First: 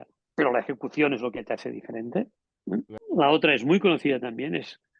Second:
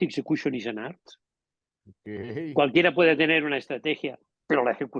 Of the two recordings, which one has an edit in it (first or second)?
first